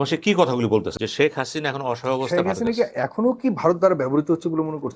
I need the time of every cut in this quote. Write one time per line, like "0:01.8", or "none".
0:00.9